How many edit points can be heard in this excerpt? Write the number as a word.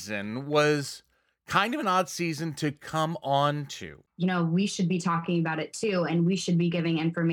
one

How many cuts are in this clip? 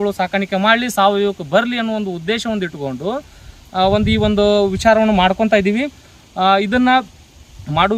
zero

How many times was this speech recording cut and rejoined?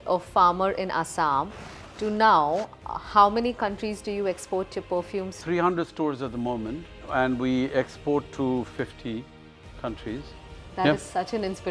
two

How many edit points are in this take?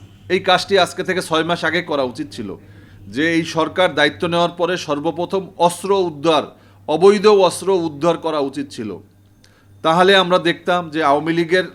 zero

